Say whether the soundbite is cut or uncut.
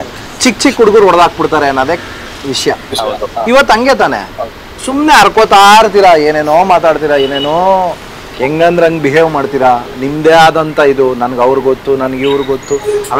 uncut